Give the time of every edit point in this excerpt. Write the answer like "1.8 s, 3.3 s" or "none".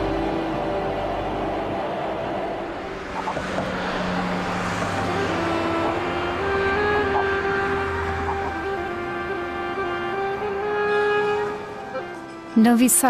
none